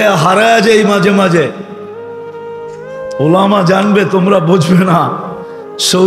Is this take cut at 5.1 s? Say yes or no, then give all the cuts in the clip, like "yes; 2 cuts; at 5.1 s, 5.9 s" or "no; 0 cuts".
no; 2 cuts; at 1.7 s, 3.2 s